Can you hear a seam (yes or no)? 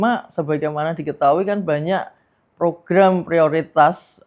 no